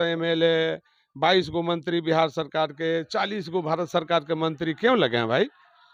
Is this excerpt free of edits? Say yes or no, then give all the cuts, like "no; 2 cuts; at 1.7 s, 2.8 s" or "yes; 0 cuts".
yes; 0 cuts